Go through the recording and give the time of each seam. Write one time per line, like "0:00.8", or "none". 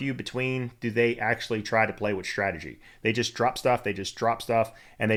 none